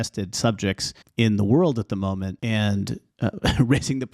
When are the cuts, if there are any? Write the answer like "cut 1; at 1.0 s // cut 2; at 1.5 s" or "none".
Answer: cut 1; at 0.9 s // cut 2; at 2.4 s // cut 3; at 3.0 s